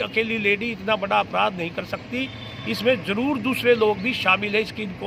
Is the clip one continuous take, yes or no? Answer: yes